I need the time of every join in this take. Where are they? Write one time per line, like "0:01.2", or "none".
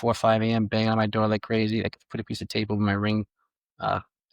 none